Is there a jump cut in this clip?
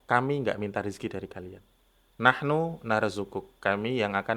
no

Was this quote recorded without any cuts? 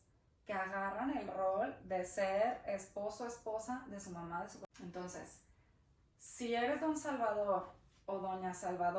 no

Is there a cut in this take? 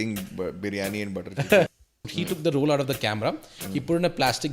yes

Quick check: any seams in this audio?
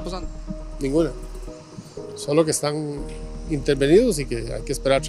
no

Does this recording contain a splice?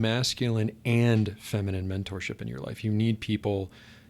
no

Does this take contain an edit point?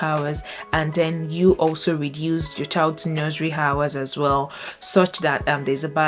no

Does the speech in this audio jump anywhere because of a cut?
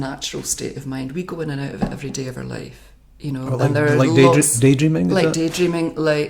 no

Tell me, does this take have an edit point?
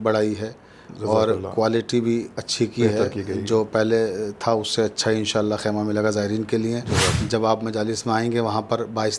yes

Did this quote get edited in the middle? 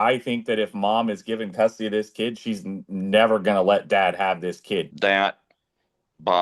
yes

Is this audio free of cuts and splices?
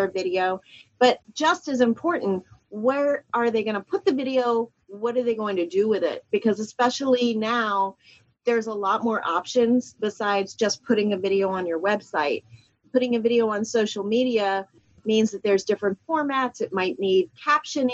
no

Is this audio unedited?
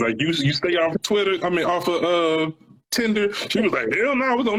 yes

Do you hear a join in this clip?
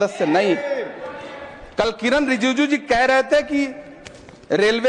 no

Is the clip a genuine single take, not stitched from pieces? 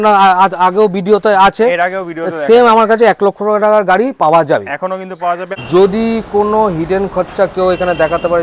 no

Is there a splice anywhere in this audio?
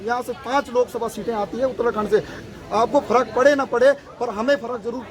no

